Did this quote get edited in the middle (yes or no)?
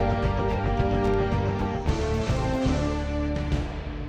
yes